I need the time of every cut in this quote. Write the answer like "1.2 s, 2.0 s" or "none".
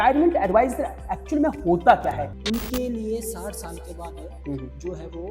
2.3 s